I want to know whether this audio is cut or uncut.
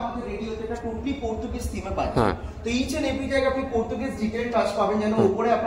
uncut